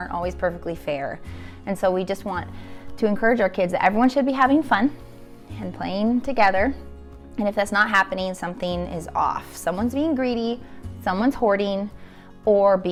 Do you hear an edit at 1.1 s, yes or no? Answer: no